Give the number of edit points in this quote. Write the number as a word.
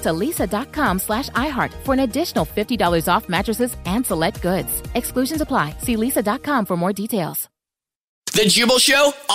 one